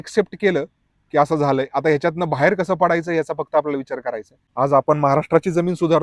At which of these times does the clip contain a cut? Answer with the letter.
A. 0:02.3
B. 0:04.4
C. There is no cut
B